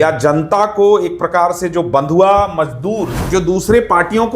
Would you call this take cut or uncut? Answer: cut